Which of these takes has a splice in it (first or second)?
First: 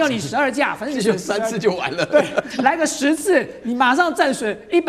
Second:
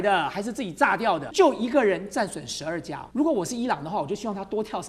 second